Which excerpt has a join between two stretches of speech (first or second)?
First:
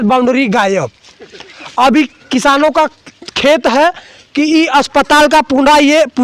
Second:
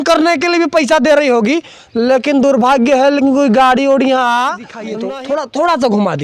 second